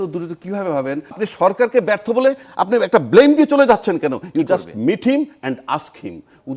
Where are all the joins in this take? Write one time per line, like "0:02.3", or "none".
0:01.2